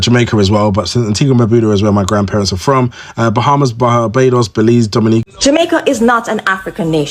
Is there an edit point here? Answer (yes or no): yes